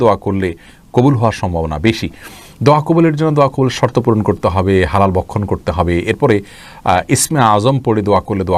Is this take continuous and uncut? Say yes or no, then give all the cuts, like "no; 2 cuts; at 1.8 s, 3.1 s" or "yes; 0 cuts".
yes; 0 cuts